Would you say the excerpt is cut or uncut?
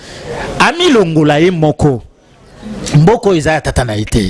uncut